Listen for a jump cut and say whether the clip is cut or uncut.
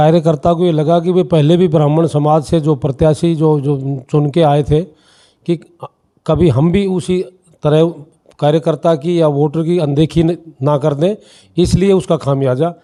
uncut